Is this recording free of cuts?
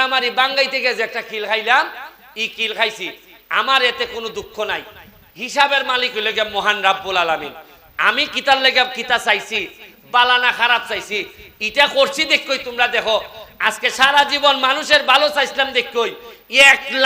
yes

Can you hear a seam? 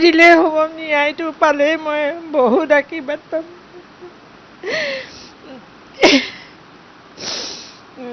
no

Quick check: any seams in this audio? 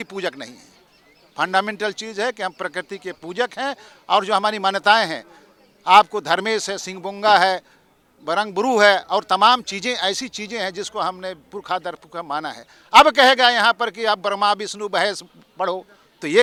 no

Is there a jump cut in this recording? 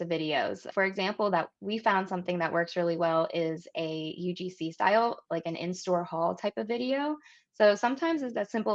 no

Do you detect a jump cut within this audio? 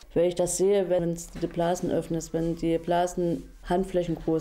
yes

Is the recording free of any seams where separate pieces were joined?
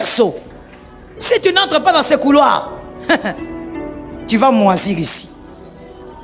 yes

